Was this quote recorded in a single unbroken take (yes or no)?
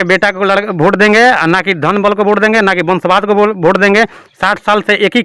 yes